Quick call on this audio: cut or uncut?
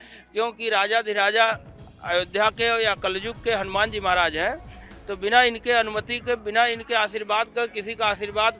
uncut